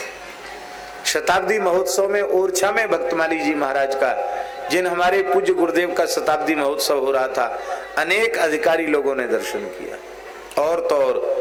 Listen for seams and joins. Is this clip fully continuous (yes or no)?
yes